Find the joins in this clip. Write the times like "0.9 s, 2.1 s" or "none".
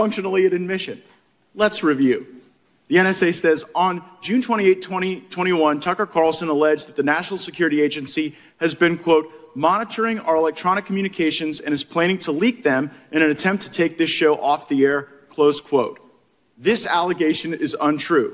none